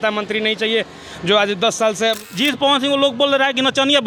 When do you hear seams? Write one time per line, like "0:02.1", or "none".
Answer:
0:02.3